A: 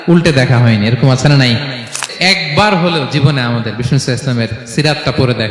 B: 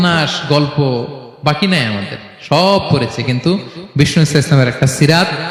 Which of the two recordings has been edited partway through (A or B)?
A